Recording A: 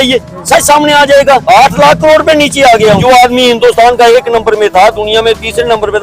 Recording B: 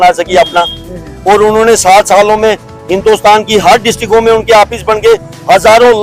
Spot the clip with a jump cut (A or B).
A